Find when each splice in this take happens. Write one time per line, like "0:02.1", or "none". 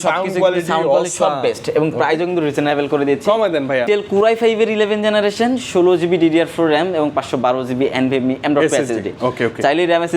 0:03.9